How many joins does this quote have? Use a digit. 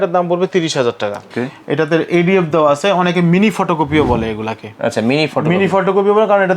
1